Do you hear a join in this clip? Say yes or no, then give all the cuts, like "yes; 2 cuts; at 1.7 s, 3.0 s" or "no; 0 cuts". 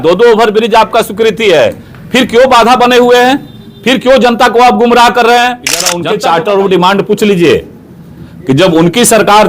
yes; 1 cut; at 6.0 s